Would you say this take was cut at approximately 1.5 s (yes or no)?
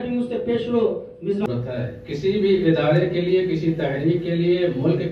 yes